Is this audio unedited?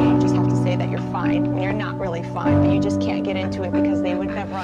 yes; 0 cuts

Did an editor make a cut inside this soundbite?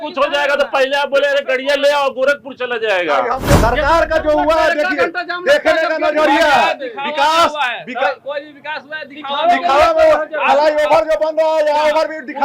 yes; 1 cut; at 3.6 s

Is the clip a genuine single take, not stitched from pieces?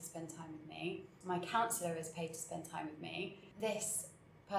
no; 2 cuts; at 1.1 s, 3.4 s

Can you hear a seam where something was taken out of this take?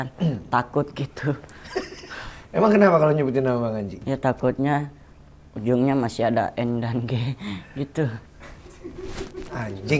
yes; 2 cuts; at 4.1 s, 8.3 s

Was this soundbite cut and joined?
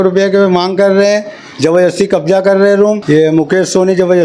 yes; 1 cut; at 3.0 s

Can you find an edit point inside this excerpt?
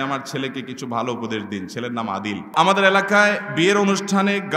yes; 1 cut; at 2.5 s

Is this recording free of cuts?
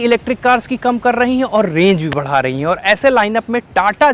yes; 0 cuts

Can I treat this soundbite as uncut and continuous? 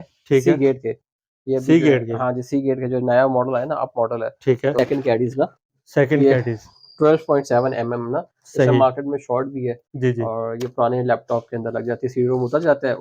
no; 1 cut; at 4.7 s

